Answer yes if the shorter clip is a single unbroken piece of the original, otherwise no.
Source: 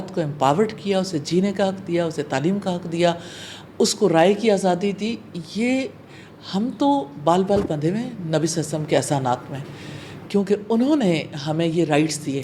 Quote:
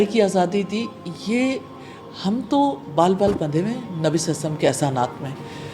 yes